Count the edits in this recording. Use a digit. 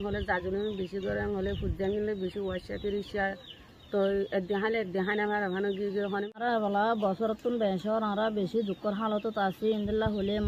1